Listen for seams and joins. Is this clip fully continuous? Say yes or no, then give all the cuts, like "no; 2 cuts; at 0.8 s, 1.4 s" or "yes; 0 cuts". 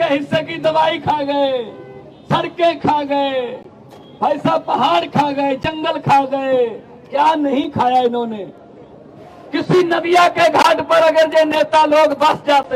yes; 0 cuts